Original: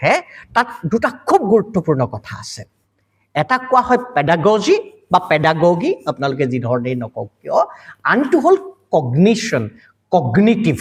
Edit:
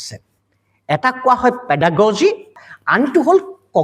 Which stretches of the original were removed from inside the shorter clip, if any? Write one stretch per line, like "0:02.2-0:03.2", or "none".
0:05.0-0:07.7